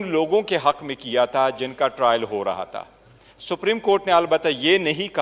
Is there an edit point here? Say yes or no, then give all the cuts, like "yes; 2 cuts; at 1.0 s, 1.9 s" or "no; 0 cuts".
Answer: no; 0 cuts